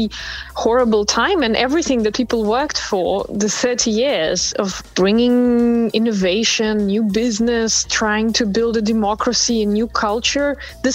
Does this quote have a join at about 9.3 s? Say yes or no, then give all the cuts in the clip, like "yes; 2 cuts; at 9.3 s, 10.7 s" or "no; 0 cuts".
no; 0 cuts